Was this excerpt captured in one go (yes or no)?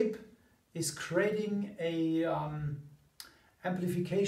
yes